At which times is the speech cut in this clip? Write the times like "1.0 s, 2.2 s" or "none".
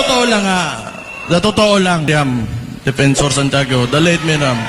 2.1 s